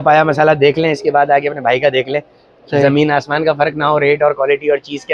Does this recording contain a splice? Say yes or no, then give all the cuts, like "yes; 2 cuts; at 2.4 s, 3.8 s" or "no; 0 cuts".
no; 0 cuts